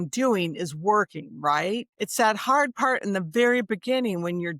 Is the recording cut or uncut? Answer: cut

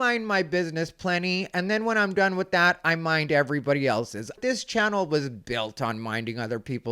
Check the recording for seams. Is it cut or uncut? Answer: cut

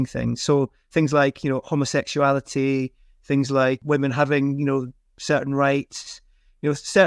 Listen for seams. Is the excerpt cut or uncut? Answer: cut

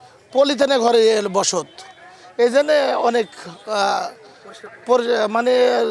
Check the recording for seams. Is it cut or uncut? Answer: uncut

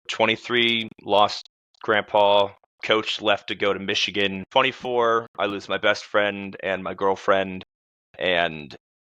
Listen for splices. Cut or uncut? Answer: cut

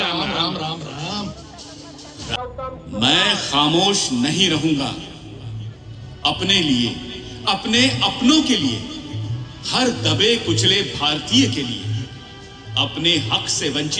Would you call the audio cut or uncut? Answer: cut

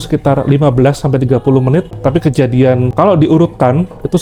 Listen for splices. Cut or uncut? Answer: uncut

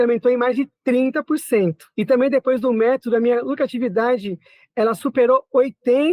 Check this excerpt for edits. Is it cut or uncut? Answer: cut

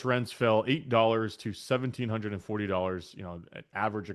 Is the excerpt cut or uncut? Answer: uncut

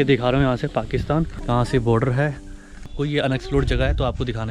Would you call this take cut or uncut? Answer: cut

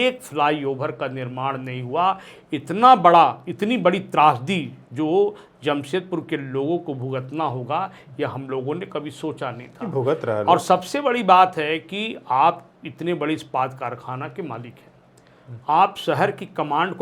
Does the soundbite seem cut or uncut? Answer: uncut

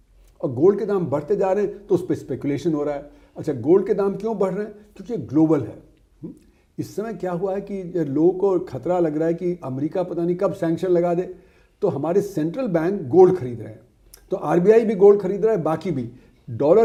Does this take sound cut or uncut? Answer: uncut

